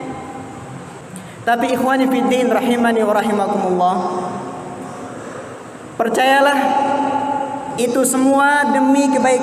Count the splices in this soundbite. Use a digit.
1